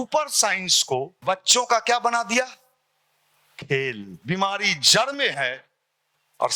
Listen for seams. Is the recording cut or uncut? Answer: cut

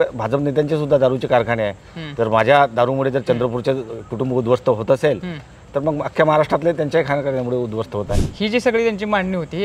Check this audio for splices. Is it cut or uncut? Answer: cut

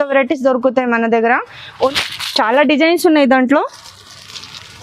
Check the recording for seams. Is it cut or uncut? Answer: cut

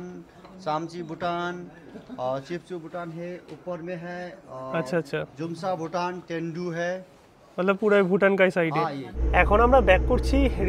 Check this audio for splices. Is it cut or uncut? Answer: uncut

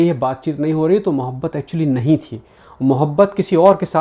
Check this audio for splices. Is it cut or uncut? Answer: uncut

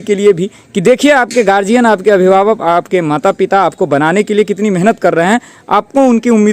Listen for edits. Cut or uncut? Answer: uncut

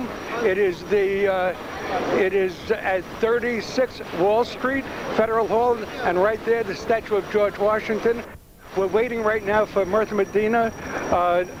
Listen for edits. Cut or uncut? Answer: uncut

